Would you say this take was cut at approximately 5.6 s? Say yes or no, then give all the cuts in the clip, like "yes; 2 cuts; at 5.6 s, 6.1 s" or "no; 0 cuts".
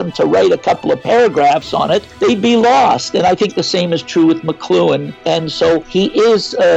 yes; 2 cuts; at 2.1 s, 5.6 s